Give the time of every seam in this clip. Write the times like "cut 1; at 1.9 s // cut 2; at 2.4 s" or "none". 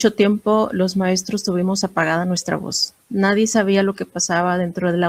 none